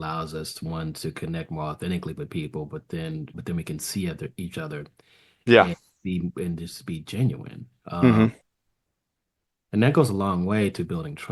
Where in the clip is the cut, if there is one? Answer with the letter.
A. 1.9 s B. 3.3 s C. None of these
C